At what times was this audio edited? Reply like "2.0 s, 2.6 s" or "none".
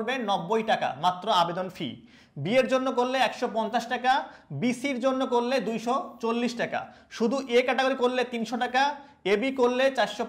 none